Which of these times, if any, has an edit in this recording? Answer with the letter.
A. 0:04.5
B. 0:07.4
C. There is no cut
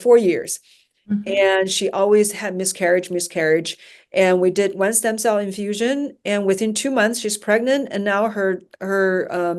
C